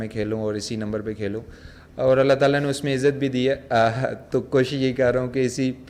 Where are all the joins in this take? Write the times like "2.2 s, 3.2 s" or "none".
none